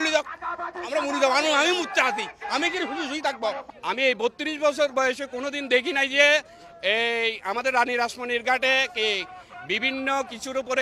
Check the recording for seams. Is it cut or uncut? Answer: cut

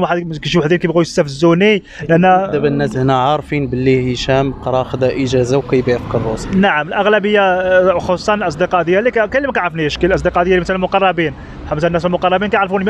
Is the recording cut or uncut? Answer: uncut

